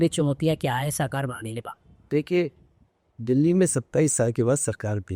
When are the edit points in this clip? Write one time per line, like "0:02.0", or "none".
none